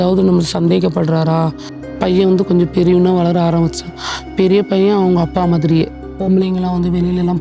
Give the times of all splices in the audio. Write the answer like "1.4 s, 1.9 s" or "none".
1.7 s, 6.0 s